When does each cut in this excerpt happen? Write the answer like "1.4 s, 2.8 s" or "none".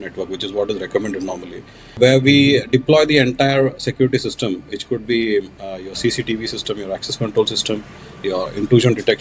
2.0 s, 8.4 s